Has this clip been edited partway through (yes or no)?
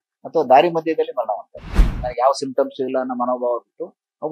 yes